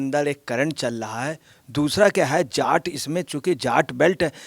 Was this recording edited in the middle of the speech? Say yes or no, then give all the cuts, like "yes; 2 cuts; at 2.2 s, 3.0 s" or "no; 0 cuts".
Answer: yes; 1 cut; at 1.5 s